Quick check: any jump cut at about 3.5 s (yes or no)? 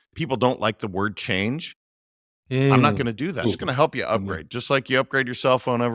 yes